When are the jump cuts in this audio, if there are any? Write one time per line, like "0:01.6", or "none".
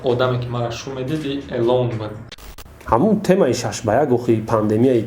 0:02.5